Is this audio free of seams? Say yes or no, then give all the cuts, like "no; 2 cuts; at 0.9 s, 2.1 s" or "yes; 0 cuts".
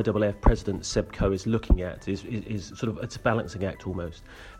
yes; 0 cuts